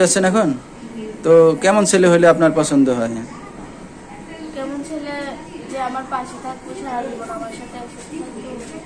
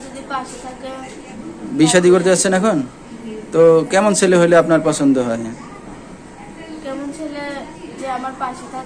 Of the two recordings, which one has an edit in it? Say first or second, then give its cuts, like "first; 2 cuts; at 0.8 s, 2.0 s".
second; 1 cut; at 1.3 s